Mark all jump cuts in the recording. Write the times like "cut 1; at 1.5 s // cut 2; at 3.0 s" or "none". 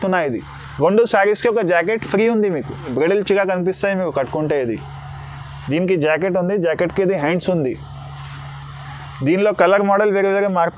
cut 1; at 2.9 s